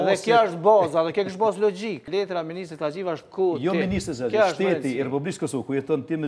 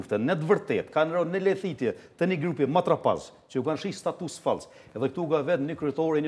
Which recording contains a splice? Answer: first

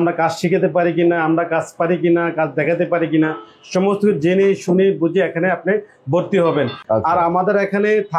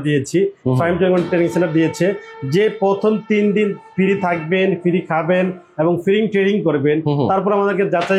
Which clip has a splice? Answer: first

